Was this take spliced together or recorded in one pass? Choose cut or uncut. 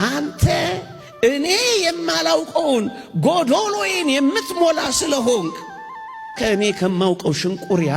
uncut